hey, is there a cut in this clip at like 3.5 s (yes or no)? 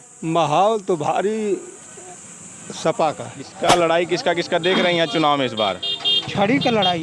yes